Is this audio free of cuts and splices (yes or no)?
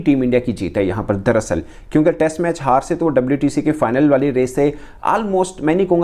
yes